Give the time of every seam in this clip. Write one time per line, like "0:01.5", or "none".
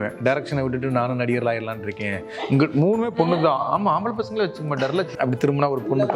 0:05.1